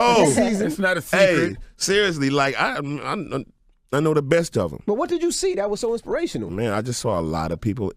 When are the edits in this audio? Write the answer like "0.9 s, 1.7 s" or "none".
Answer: 2.8 s